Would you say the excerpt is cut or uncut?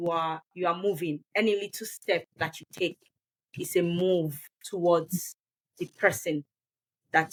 uncut